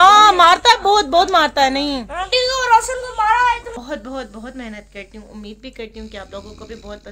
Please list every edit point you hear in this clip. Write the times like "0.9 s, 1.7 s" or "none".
3.7 s